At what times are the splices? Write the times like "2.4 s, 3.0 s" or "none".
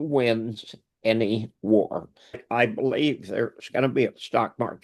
2.4 s